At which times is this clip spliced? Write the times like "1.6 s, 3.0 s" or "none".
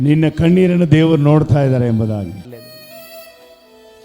2.4 s